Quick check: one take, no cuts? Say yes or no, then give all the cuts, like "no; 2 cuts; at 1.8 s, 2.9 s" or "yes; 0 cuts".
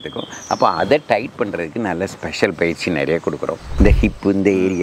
no; 1 cut; at 3.6 s